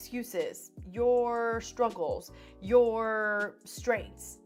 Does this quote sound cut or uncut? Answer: uncut